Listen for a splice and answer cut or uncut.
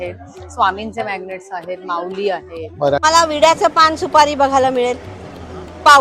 cut